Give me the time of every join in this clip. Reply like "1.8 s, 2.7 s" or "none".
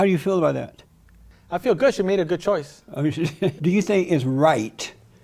3.6 s